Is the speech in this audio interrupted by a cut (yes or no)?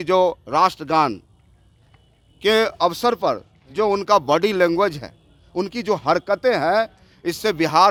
no